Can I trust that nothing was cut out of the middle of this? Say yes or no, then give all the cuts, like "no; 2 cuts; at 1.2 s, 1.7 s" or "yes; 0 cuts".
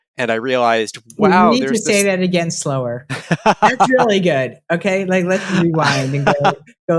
yes; 0 cuts